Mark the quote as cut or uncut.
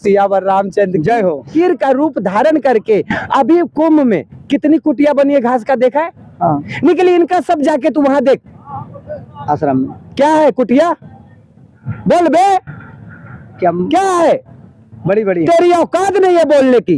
cut